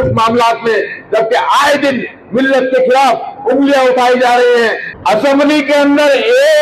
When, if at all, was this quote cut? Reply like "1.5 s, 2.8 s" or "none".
4.9 s